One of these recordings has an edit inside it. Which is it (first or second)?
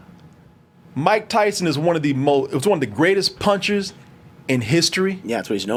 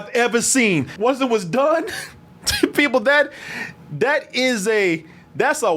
second